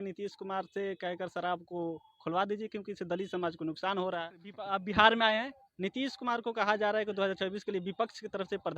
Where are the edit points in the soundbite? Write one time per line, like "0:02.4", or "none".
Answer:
0:04.7